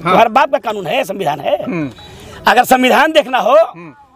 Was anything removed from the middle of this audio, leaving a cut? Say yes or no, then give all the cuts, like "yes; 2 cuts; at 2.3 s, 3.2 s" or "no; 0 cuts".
no; 0 cuts